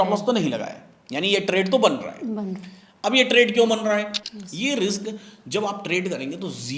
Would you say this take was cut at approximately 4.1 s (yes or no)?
yes